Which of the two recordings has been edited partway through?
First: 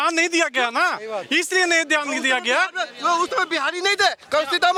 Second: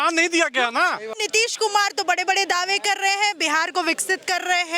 second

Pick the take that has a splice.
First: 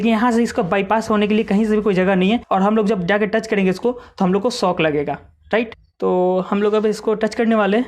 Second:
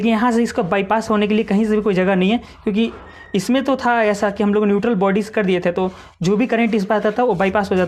first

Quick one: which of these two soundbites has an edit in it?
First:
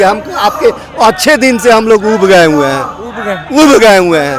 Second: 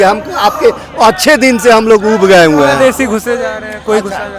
second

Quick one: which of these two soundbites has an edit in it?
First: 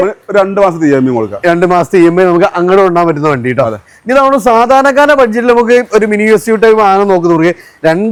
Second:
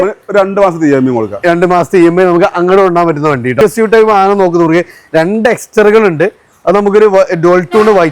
second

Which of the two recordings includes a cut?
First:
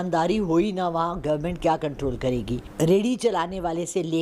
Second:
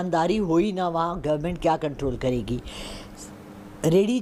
first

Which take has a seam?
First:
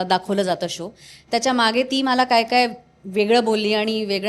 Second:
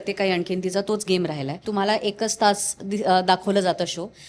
second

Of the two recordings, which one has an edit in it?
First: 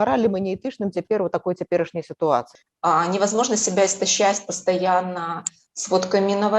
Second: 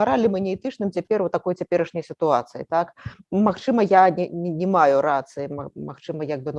first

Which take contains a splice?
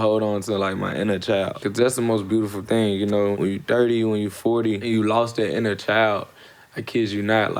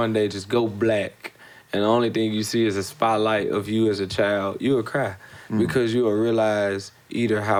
first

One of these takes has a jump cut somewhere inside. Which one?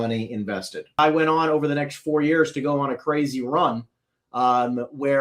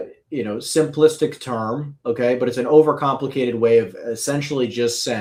first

